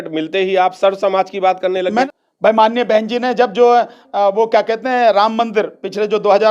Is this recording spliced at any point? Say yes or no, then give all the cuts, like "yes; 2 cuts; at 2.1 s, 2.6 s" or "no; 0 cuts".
yes; 1 cut; at 2.1 s